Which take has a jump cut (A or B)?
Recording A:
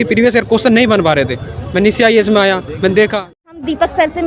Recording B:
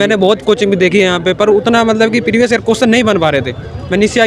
A